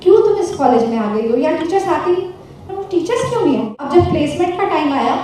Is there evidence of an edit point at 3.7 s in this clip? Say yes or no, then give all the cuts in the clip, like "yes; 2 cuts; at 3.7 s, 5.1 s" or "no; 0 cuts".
yes; 1 cut; at 3.7 s